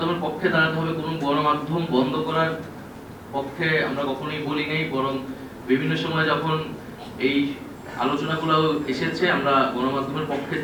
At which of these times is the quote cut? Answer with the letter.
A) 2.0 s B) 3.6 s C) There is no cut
C